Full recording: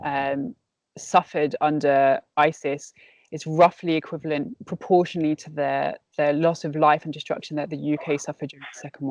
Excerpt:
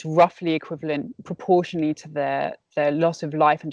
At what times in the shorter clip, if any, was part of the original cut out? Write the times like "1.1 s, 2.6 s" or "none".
none